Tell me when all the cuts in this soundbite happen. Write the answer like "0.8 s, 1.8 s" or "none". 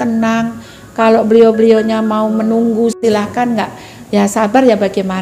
3.0 s